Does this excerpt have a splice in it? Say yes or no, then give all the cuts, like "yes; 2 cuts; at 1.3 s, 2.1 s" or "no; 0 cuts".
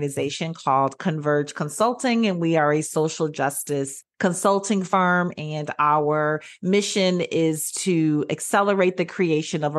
no; 0 cuts